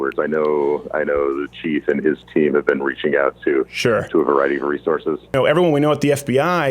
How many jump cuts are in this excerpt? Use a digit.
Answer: 1